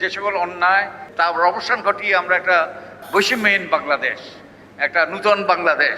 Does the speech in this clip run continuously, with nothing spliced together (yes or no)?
no